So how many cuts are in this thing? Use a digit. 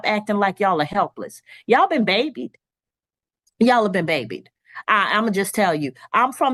0